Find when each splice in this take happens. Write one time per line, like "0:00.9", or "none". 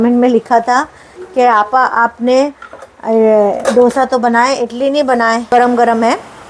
0:05.5